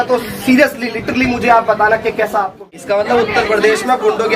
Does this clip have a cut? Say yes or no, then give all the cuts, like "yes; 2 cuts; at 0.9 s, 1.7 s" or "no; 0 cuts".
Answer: yes; 1 cut; at 2.7 s